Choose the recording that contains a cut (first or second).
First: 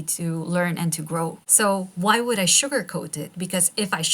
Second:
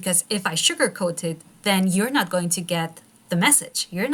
first